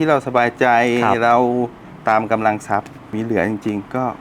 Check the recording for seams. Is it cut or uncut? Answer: cut